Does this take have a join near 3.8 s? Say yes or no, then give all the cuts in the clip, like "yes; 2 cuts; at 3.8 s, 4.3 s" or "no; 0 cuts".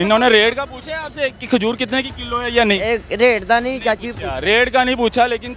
no; 0 cuts